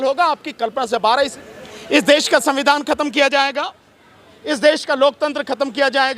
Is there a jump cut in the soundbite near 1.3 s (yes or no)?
yes